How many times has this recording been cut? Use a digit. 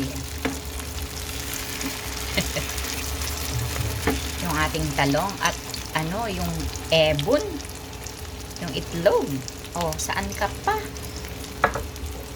0